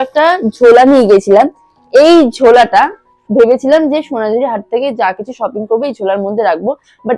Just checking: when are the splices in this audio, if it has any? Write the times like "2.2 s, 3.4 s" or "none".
none